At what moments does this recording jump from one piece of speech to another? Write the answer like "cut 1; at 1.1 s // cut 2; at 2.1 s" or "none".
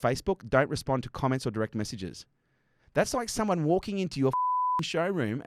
none